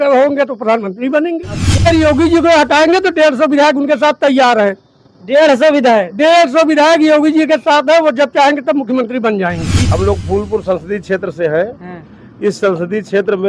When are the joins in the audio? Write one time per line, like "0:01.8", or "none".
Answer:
0:01.8
0:09.7